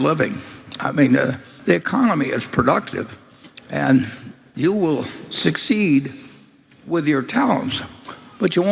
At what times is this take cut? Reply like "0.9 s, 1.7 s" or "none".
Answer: 1.6 s